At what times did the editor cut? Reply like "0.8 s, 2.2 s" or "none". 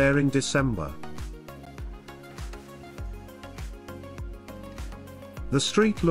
0.9 s, 5.0 s